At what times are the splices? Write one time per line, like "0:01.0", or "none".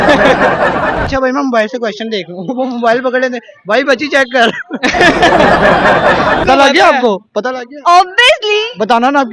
0:01.1
0:06.4